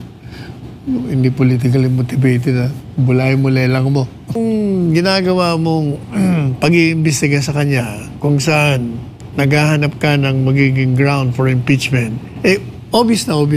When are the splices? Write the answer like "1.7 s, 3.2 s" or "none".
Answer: 4.4 s

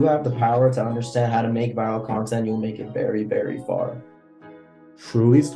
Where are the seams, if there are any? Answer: 4.6 s

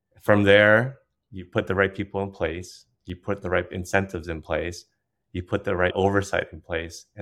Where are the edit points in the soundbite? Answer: none

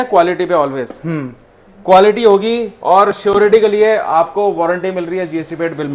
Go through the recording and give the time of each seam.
none

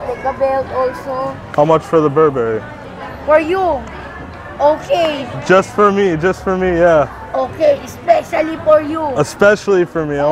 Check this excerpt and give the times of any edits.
1.4 s

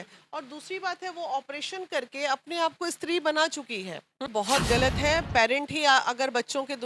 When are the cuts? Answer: 4.3 s

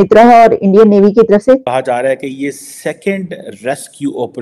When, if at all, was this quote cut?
1.7 s

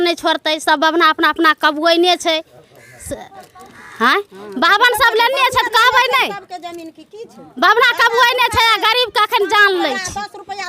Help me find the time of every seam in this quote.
none

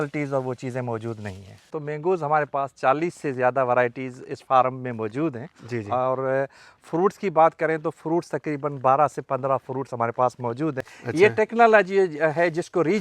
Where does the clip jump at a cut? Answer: 1.7 s, 10.9 s

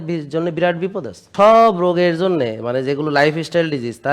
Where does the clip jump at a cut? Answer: 1.2 s

